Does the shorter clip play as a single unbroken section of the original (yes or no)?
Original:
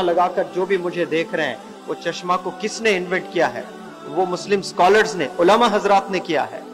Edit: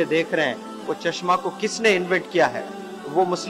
yes